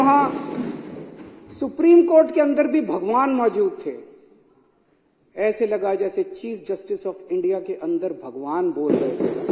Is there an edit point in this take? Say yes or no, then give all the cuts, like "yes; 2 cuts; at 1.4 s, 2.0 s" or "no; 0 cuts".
no; 0 cuts